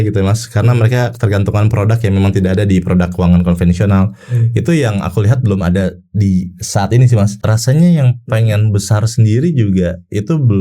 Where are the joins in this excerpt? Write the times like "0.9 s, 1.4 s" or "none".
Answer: 7.4 s